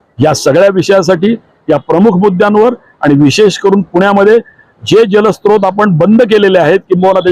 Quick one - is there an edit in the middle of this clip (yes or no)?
no